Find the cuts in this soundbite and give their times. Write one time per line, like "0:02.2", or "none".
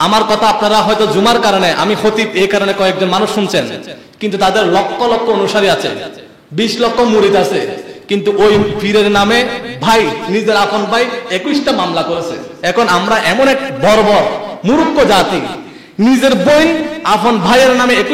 0:12.5